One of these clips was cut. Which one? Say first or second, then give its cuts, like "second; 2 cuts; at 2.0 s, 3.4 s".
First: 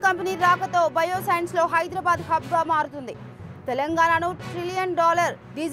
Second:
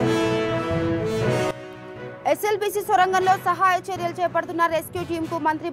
second; 1 cut; at 1.6 s